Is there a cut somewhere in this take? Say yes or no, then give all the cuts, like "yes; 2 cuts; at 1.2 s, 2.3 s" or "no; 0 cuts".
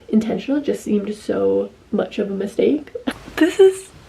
yes; 1 cut; at 3.1 s